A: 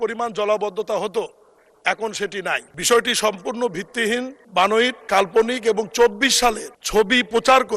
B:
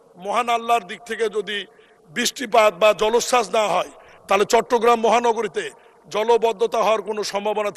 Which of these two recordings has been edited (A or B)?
A